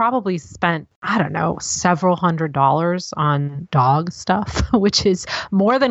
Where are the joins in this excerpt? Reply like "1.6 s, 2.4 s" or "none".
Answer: 0.9 s, 3.6 s